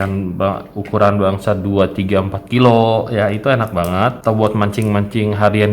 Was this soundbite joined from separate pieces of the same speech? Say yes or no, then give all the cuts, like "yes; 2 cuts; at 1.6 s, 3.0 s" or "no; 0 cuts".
yes; 1 cut; at 4.2 s